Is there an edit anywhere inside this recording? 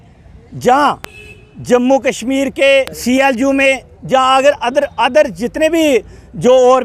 yes; 1 cut; at 2.9 s

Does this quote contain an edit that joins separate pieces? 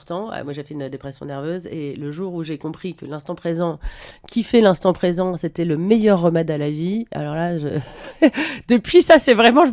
no; 0 cuts

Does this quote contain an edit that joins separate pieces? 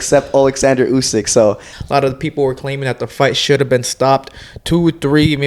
yes; 1 cut; at 1.7 s

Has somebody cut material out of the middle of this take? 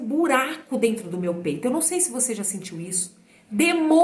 yes; 1 cut; at 3.1 s

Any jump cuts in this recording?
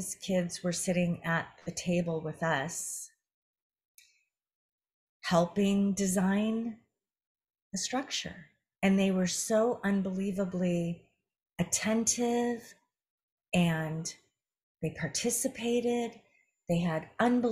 no; 0 cuts

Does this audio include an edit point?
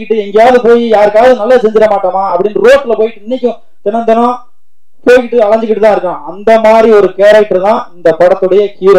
no; 0 cuts

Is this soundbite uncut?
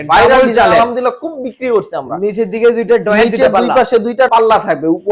yes; 0 cuts

